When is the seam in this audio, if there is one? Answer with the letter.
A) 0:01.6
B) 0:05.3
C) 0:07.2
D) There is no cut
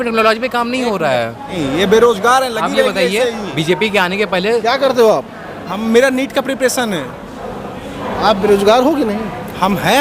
A